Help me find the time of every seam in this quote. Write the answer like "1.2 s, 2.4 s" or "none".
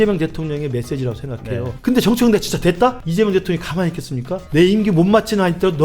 1.7 s, 3.0 s, 4.4 s